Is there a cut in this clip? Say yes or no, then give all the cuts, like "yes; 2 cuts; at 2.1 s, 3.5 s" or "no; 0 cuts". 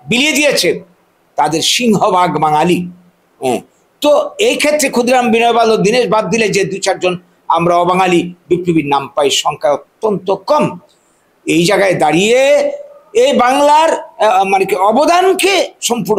no; 0 cuts